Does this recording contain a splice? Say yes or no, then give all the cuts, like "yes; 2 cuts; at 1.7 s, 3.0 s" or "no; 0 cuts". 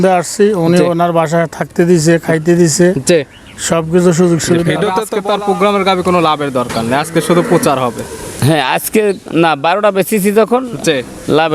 yes; 1 cut; at 5.1 s